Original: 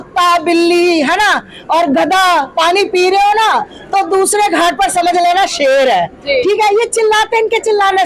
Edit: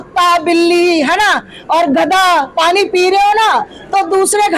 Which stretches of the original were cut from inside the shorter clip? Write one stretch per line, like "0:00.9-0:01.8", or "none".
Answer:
none

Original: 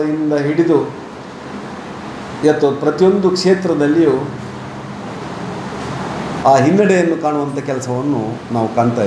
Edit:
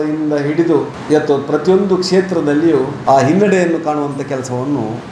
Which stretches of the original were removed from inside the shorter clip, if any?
0:01.0-0:02.3
0:04.3-0:06.3

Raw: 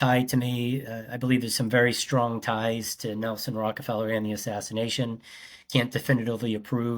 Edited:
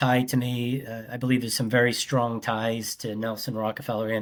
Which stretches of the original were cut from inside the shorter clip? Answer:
none

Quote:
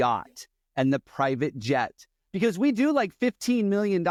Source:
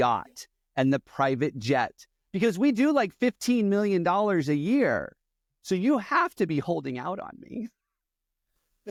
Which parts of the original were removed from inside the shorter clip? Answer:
none

